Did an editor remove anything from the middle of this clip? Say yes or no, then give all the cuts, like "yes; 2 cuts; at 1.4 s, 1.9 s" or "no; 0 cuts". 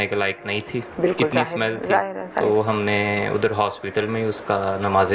no; 0 cuts